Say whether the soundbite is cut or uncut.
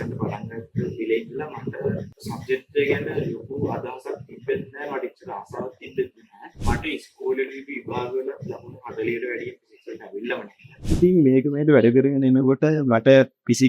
cut